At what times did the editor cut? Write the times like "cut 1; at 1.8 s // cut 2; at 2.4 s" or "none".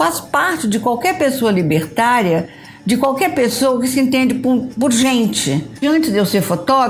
cut 1; at 5.8 s

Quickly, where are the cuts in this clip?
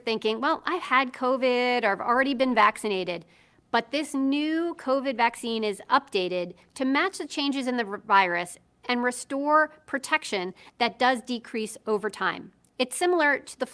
cut 1; at 8.2 s // cut 2; at 12.4 s

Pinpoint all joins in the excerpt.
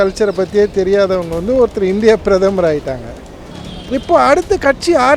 cut 1; at 3.1 s

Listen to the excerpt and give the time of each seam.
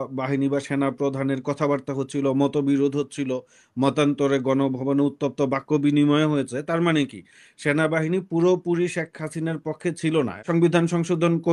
cut 1; at 10.4 s

